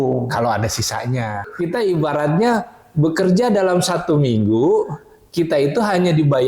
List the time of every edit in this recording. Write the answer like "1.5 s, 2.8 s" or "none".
1.4 s